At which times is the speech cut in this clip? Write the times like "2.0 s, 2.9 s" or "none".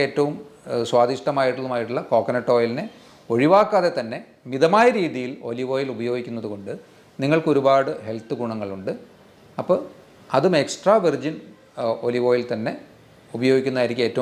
none